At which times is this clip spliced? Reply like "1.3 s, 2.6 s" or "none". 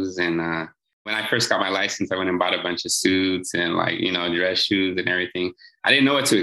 1.2 s